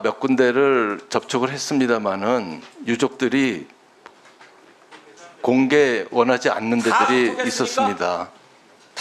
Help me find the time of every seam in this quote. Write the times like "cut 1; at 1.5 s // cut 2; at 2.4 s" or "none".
none